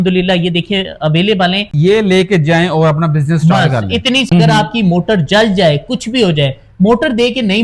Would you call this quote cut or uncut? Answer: cut